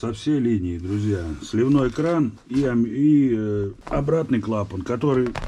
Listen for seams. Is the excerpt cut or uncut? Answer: cut